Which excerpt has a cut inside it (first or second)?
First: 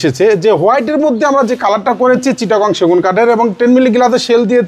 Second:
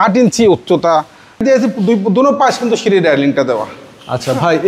second